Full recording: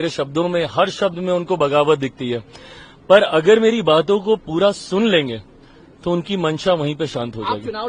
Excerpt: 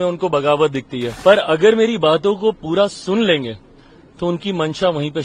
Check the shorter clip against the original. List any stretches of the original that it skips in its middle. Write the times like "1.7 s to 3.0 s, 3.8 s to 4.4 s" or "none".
2.3 s to 2.9 s